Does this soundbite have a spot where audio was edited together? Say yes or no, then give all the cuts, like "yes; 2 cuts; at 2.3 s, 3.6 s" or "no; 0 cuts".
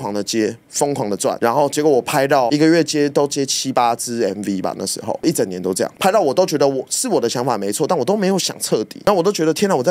no; 0 cuts